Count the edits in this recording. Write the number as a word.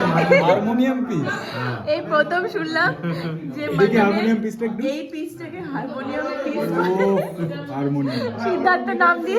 zero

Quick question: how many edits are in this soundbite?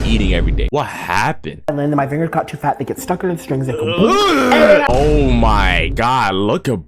two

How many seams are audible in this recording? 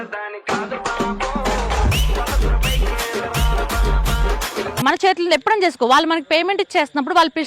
one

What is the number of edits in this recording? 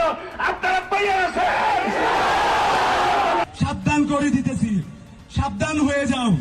one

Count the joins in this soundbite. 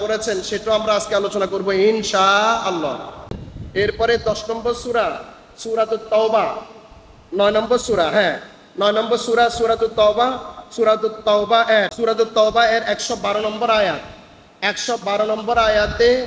two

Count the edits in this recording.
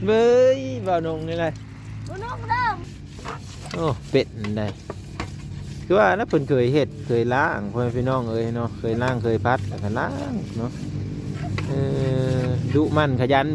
one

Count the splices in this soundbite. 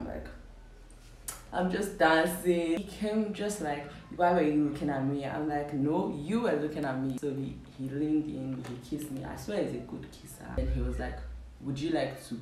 three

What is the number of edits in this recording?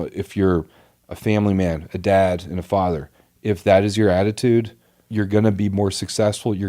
one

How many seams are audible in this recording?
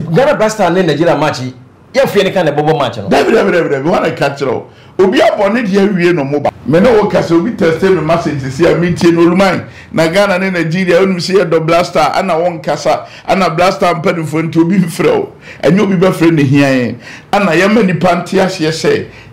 one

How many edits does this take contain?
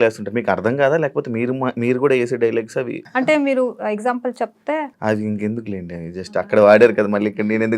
two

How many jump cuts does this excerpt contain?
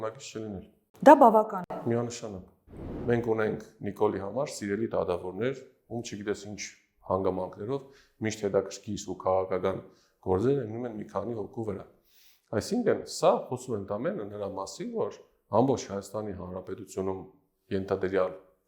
one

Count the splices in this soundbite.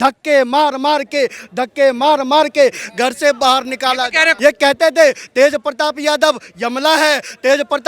one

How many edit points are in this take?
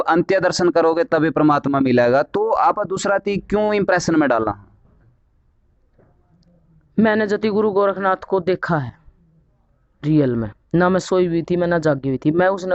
zero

